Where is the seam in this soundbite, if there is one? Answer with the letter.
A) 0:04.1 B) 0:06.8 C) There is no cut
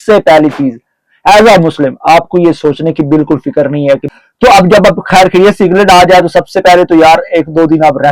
A